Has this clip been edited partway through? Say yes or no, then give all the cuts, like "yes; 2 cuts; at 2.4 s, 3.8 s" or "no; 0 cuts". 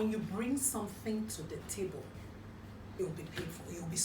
yes; 1 cut; at 2.2 s